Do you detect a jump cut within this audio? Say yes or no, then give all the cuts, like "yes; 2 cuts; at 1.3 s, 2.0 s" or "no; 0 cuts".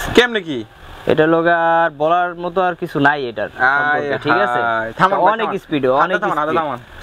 no; 0 cuts